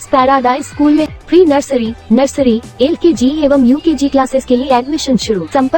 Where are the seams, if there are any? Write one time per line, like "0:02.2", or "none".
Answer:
0:01.1